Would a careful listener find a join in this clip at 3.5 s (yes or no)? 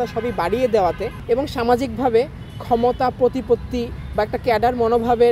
no